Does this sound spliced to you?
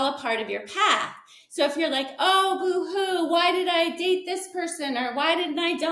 no; 0 cuts

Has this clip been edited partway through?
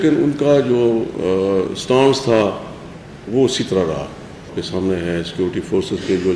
yes; 1 cut; at 4.6 s

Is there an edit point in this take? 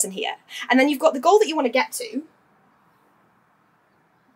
no; 0 cuts

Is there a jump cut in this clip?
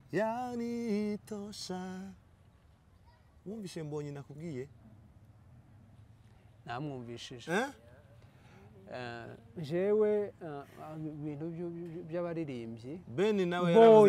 no; 0 cuts

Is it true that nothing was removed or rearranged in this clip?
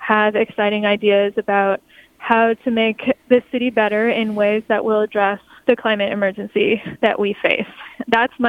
no; 1 cut; at 5.5 s

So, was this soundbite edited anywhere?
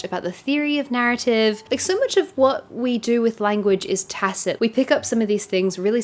no; 0 cuts

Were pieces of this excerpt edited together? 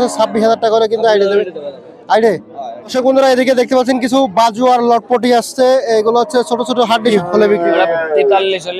yes; 2 cuts; at 2.9 s, 7.1 s

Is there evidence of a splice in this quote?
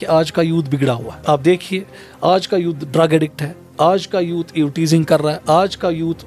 yes; 1 cut; at 1.1 s

